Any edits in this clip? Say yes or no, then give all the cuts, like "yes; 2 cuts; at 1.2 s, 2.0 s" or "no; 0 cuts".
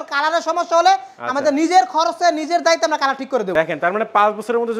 no; 0 cuts